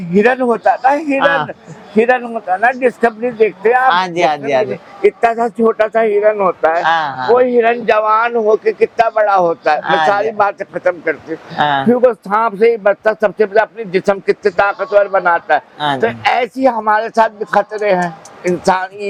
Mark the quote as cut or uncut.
uncut